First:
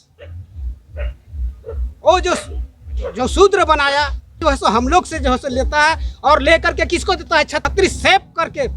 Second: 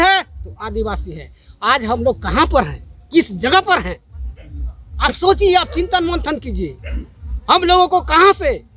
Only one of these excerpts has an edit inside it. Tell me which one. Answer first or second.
first